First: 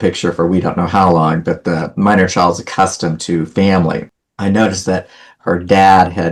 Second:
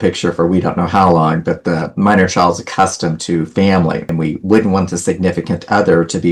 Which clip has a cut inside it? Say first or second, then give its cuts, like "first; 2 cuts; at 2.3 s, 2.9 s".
second; 1 cut; at 4.1 s